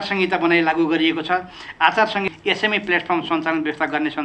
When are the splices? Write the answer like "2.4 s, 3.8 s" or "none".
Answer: none